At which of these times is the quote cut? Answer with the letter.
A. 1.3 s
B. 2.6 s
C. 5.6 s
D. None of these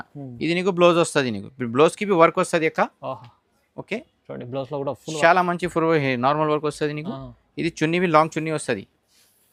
D